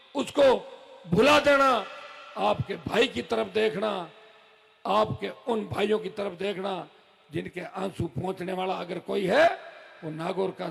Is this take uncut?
yes; 0 cuts

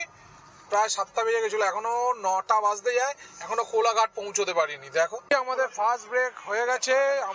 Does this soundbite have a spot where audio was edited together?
yes; 1 cut; at 5.2 s

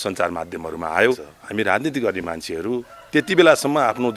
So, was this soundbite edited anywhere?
yes; 1 cut; at 1.3 s

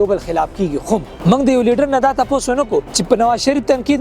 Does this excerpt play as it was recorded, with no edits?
no; 2 cuts; at 1.1 s, 2.9 s

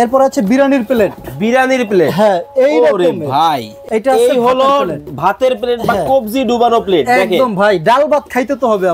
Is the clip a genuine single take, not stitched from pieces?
no; 1 cut; at 3.8 s

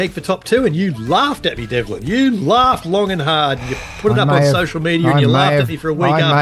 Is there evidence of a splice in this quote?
no; 0 cuts

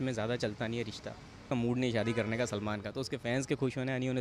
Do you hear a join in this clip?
yes; 1 cut; at 1.5 s

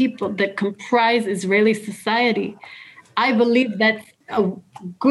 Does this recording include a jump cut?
no; 0 cuts

